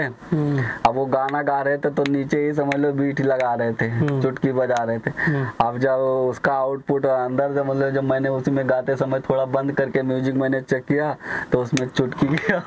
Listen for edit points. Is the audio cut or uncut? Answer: uncut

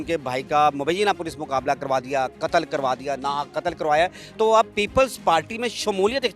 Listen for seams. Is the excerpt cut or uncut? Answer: uncut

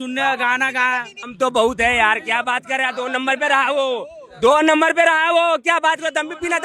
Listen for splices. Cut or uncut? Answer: cut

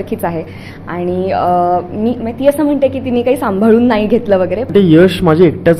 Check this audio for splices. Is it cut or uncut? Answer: cut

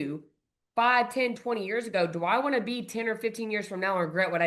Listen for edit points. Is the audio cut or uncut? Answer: uncut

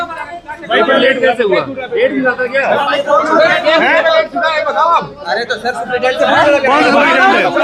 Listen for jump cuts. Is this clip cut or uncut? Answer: uncut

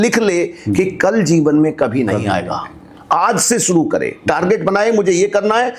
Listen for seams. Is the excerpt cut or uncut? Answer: uncut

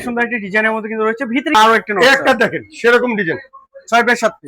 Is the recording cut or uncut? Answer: cut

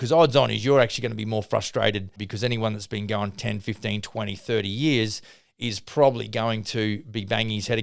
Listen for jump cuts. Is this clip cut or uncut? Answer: cut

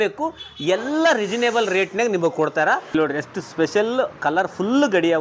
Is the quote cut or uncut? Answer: cut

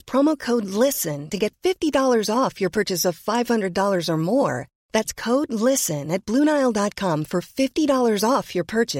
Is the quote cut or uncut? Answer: uncut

